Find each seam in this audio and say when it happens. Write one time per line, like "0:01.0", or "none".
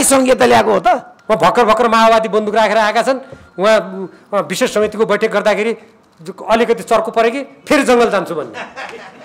0:01.1